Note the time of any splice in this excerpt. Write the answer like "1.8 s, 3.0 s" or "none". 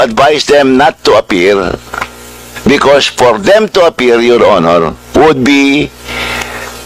none